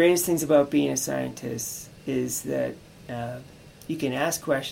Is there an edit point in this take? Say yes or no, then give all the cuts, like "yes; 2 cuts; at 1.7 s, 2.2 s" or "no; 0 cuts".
no; 0 cuts